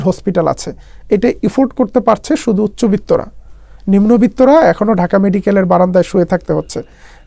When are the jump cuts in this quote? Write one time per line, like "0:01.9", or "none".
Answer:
none